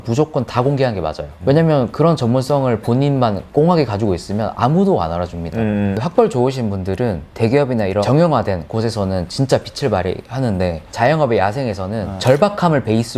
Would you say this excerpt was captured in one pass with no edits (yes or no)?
no